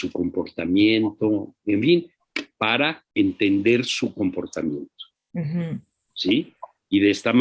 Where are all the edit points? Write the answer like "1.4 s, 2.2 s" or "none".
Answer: 3.0 s